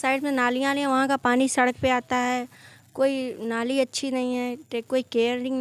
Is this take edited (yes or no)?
no